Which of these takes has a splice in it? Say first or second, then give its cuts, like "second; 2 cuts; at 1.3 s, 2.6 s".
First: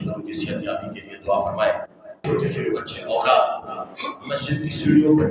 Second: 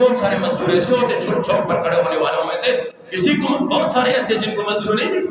first; 1 cut; at 2.2 s